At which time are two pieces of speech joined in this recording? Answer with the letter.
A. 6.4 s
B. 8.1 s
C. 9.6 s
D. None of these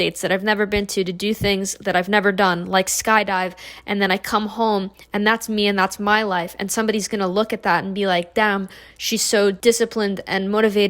C